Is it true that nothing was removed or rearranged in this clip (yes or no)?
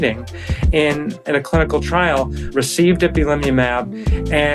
no